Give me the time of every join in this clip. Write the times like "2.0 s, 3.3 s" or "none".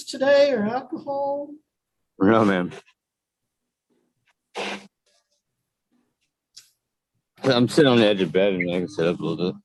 none